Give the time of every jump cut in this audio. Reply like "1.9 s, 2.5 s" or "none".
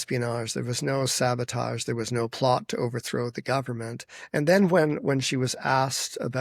none